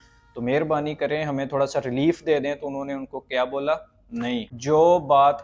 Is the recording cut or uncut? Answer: cut